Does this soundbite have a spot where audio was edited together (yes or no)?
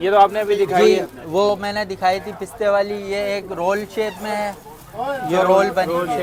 no